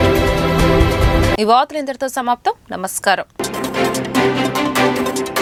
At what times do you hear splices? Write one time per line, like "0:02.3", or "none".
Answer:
none

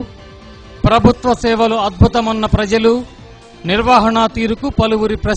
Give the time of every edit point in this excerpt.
none

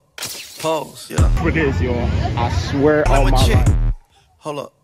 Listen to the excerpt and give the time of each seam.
0:01.3

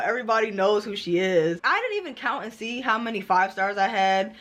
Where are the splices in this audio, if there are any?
0:01.6

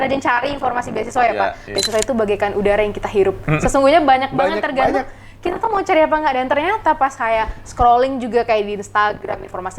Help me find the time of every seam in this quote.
0:01.7

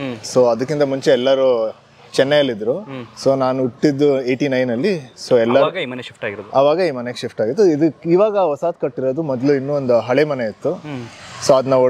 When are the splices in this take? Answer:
none

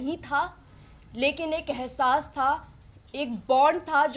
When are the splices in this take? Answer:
none

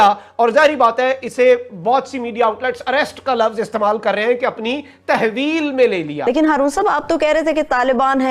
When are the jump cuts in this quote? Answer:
0:06.2

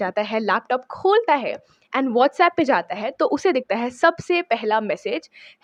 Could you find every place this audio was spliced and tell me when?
none

